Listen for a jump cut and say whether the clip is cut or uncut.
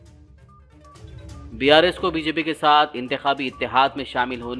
uncut